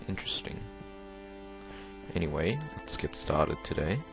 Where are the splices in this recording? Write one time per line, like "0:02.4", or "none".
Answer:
0:02.8